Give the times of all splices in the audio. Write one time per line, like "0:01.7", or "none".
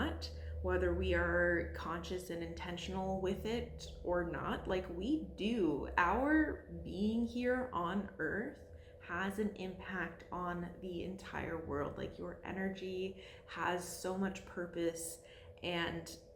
none